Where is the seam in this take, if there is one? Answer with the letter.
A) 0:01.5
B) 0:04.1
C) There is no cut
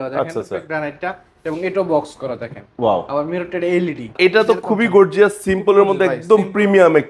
B